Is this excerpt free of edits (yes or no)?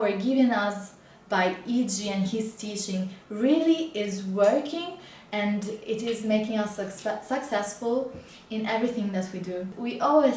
yes